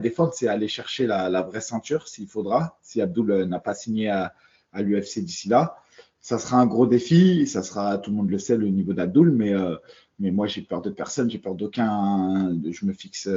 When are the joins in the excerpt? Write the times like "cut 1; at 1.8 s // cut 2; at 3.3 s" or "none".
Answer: none